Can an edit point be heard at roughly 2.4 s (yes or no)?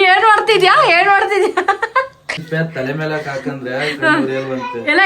yes